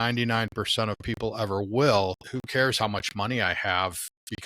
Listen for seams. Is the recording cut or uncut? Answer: cut